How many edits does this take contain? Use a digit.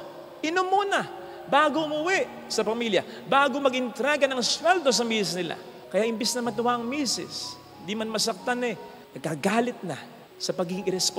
0